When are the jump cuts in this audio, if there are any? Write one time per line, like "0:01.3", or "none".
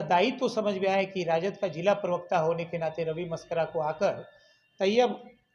none